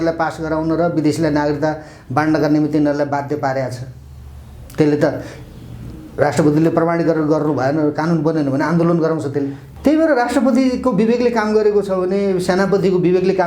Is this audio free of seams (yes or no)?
no